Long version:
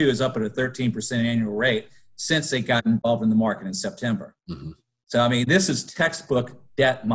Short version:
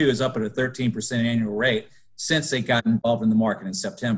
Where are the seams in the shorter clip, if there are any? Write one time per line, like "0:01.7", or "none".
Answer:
none